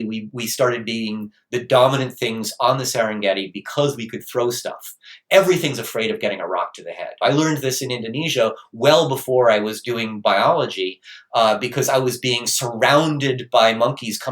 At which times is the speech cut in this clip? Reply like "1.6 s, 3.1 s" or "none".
7.1 s